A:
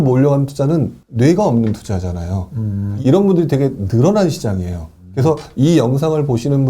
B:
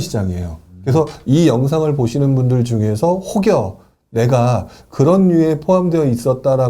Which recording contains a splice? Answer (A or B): A